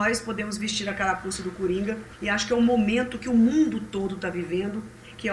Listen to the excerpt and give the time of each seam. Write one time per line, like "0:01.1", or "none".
0:02.1